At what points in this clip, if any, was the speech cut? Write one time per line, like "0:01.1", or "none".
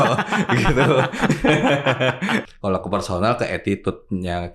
0:02.5